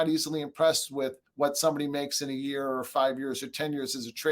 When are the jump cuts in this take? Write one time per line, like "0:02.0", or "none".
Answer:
0:01.2